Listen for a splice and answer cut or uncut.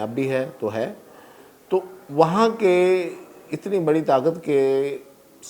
uncut